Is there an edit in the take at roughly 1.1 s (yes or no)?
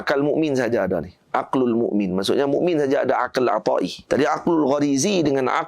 no